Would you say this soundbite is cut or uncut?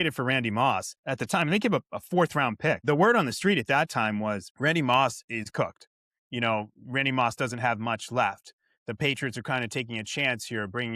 cut